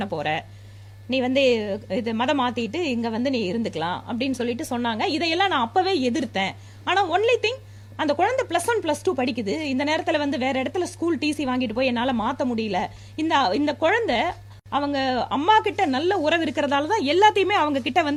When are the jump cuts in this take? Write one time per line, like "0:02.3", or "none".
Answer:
none